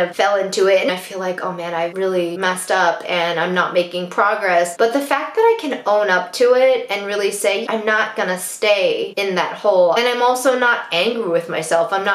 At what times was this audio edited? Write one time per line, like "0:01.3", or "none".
0:00.9
0:02.4
0:07.6
0:10.0